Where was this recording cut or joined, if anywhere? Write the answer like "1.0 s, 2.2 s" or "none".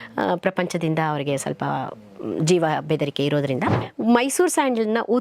3.8 s